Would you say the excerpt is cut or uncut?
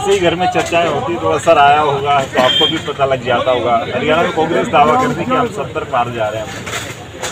uncut